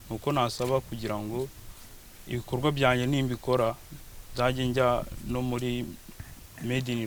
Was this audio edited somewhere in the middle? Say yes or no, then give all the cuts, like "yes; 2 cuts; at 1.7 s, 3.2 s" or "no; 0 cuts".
no; 0 cuts